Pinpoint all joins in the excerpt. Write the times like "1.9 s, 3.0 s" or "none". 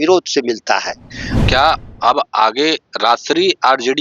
1.3 s